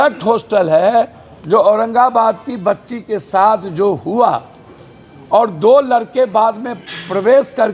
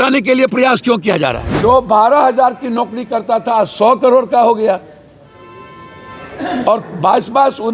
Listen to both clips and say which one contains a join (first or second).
second